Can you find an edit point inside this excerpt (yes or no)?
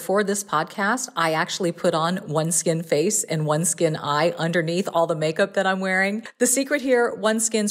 yes